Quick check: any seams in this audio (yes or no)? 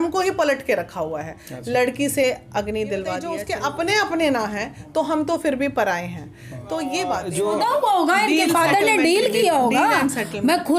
yes